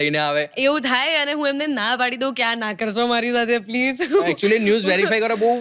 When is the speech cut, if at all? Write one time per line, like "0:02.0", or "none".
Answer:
none